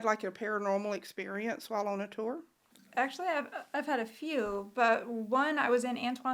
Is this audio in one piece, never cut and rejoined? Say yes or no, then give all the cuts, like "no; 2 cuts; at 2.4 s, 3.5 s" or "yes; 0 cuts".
yes; 0 cuts